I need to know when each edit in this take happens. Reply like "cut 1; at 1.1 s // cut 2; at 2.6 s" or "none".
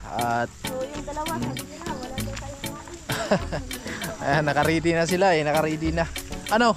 none